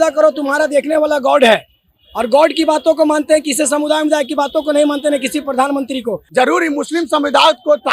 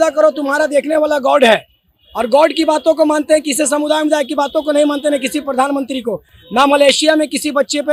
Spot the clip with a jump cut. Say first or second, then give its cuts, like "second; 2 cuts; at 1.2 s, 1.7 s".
first; 1 cut; at 6.2 s